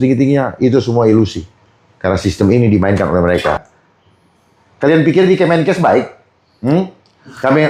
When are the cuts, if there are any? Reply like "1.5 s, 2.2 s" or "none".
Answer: 3.7 s